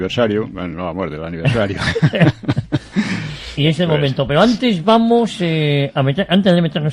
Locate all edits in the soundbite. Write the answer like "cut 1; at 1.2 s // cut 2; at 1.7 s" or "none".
none